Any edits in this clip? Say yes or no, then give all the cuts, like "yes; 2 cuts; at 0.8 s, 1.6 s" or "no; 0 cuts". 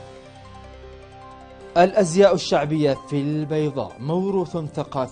yes; 1 cut; at 1.5 s